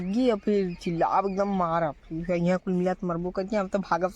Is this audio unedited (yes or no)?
yes